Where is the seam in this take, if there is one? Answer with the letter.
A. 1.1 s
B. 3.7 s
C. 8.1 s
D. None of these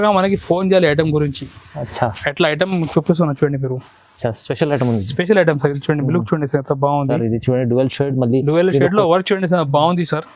D